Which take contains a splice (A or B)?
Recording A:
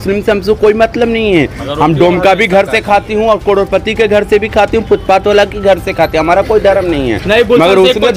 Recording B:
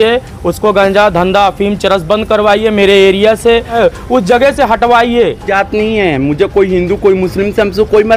B